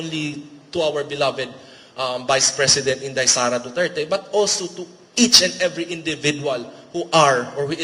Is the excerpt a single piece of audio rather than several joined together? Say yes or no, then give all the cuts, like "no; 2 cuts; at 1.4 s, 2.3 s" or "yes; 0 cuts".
yes; 0 cuts